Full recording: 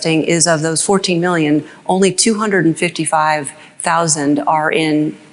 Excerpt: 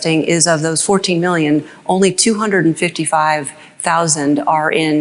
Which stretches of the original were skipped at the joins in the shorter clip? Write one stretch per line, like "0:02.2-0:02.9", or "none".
none